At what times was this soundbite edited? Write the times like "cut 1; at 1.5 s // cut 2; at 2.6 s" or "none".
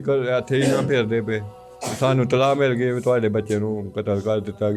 none